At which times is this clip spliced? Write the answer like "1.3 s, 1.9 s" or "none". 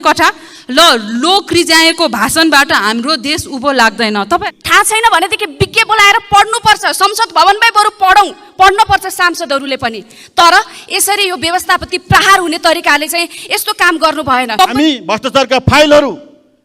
4.4 s, 14.6 s

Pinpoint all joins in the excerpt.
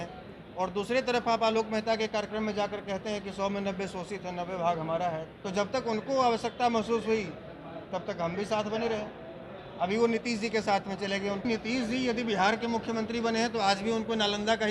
5.4 s, 11.4 s

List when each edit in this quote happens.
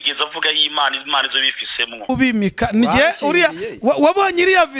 2.1 s

